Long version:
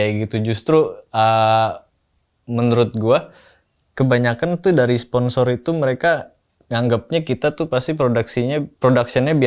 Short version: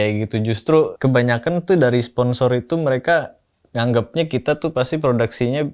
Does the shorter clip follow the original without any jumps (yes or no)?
no